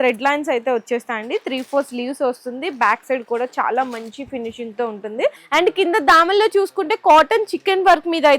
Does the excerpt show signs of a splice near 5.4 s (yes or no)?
yes